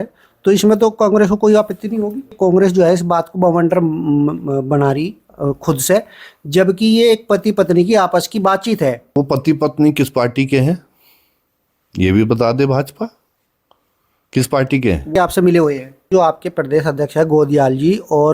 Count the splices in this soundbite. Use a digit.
4